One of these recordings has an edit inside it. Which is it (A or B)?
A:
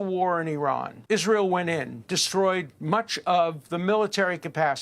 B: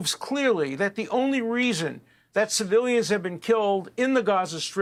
A